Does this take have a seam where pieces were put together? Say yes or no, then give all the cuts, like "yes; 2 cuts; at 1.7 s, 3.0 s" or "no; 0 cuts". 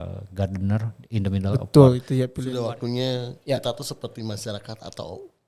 yes; 1 cut; at 2.4 s